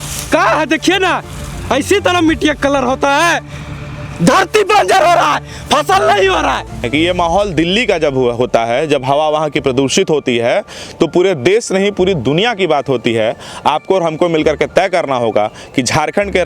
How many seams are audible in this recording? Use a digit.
1